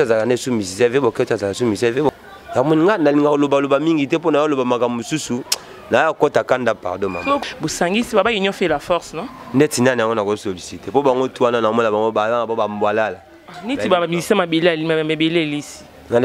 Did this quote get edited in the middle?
yes; 2 cuts; at 2.1 s, 7.4 s

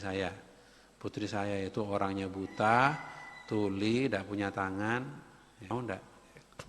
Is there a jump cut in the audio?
yes; 1 cut; at 5.6 s

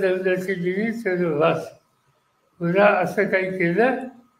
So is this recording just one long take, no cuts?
yes; 0 cuts

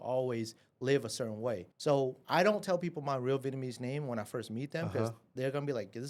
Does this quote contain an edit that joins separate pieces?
yes; 1 cut; at 1.7 s

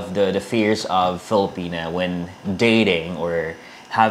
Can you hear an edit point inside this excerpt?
no; 0 cuts

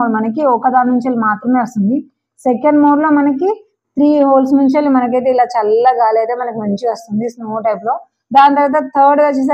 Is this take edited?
no; 0 cuts

